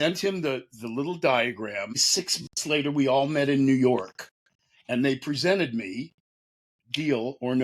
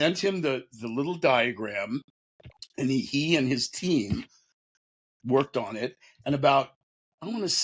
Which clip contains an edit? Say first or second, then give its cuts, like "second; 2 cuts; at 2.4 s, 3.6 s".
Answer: first; 1 cut; at 2.1 s